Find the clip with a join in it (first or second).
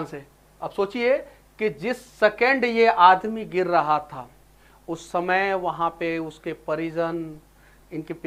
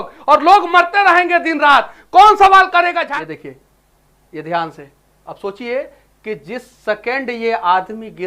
second